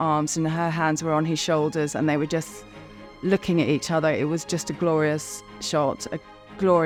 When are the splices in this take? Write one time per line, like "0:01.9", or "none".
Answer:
none

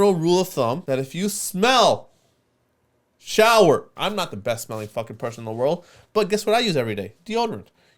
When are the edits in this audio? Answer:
0:00.8
0:03.9

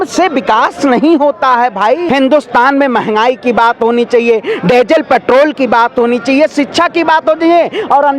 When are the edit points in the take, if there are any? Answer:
0:02.0

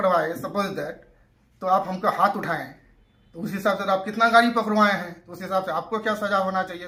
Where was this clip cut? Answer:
none

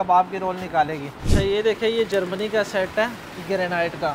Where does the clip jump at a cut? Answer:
0:01.1

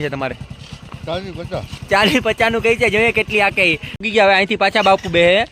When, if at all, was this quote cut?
0:04.0

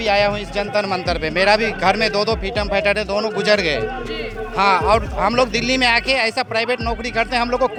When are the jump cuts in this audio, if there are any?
none

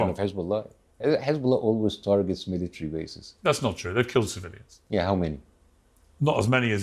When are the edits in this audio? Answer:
0:03.3

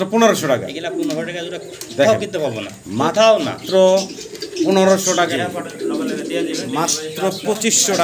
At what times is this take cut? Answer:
0:05.3

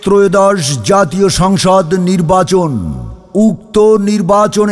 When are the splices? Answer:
none

